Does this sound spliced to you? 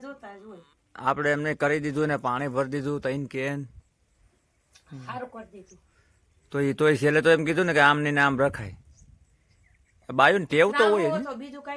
no; 0 cuts

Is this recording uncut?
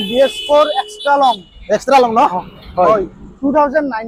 yes; 0 cuts

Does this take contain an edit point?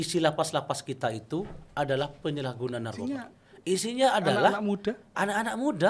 yes; 1 cut; at 3.1 s

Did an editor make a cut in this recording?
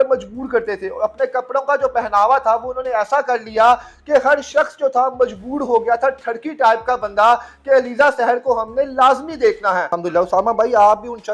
yes; 1 cut; at 9.9 s

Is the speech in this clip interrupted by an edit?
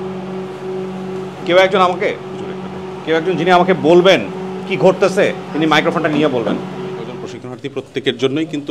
yes; 2 cuts; at 1.4 s, 7.3 s

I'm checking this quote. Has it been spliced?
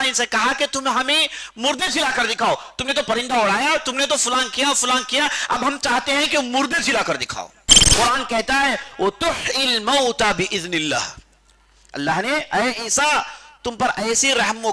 yes; 1 cut; at 7.8 s

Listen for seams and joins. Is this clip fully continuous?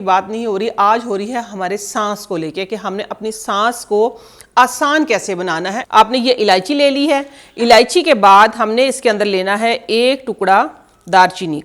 no; 1 cut; at 5.8 s

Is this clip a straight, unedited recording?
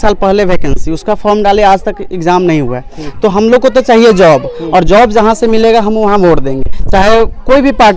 yes; 0 cuts

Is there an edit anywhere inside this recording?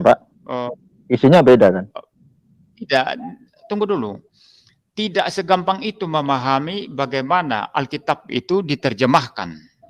no; 0 cuts

